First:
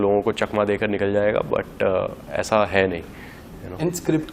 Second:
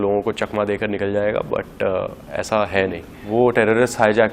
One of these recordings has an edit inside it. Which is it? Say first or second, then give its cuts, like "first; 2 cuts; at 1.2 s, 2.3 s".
second; 1 cut; at 3.1 s